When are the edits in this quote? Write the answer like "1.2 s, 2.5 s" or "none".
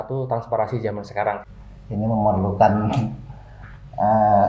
1.5 s